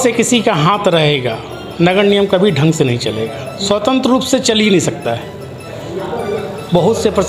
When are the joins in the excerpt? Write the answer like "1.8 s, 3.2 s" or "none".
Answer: none